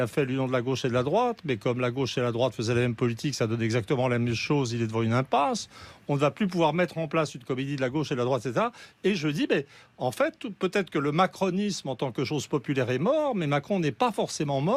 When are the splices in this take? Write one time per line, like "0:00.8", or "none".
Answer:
none